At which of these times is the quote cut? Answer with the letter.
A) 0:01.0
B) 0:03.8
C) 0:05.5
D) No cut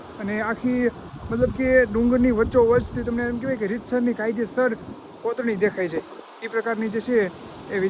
D